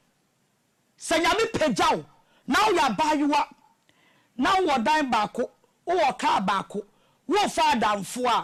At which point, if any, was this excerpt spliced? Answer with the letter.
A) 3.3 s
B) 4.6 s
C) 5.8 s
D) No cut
D